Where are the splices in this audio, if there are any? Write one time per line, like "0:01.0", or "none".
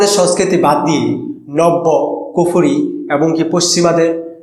none

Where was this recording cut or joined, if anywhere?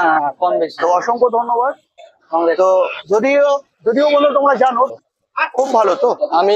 0:05.0

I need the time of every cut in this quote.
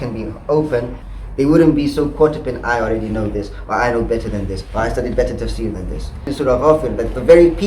0:01.0
0:06.3

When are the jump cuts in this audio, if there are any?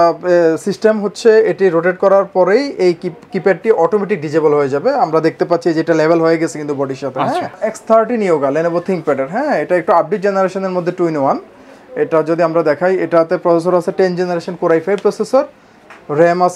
0:07.7

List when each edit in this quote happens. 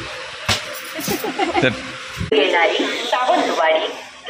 0:02.2

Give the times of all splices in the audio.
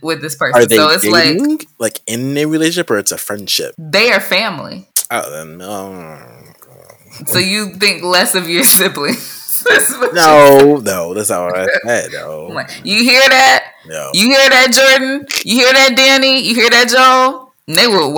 0:03.8
0:04.9

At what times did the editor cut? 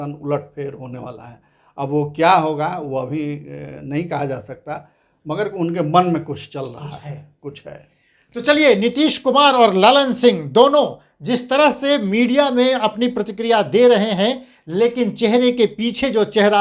none

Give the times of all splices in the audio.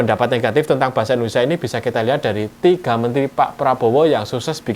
none

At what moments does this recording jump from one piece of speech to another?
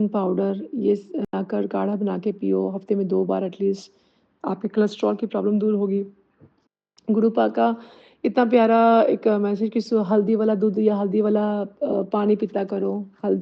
0:01.3

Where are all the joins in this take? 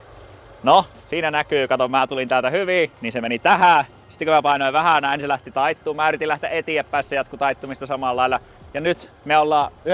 none

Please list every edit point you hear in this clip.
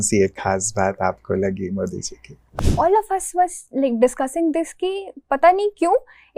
0:02.4

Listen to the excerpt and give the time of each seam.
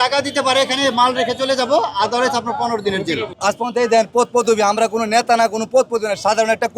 0:03.3

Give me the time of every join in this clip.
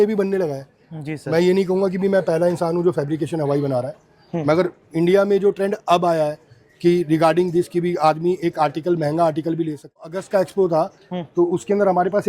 0:10.1

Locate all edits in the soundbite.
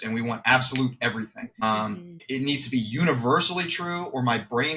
none

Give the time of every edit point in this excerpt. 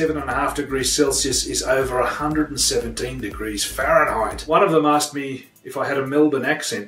0:04.4

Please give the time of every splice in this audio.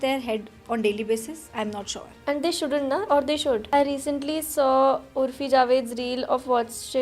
0:03.6

